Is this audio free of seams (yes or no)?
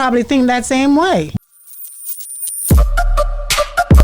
no